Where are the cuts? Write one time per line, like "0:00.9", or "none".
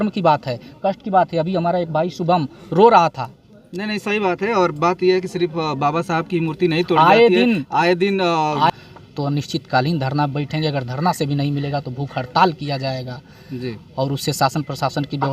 0:08.7